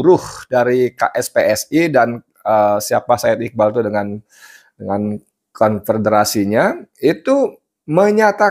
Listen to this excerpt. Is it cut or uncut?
uncut